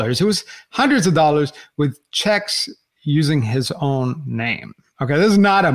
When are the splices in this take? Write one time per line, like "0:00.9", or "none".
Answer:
none